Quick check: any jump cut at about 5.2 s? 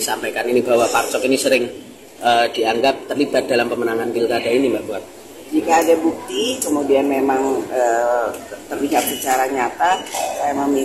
no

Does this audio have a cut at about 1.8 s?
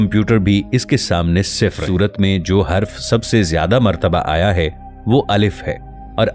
yes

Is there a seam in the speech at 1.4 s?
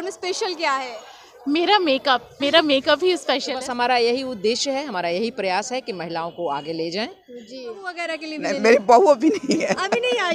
no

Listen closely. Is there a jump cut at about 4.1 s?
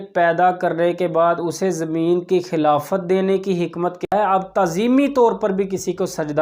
yes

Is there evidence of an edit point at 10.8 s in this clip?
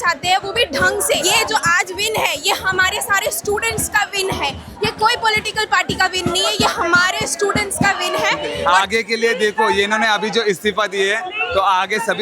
no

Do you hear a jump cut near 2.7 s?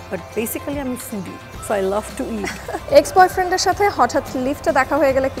yes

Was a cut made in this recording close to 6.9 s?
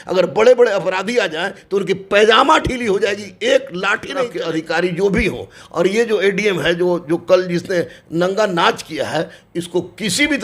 no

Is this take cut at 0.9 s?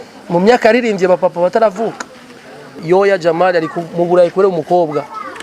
no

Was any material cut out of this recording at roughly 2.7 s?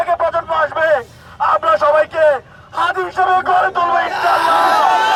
no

